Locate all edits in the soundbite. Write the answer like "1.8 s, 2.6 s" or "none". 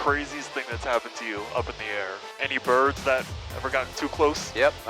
none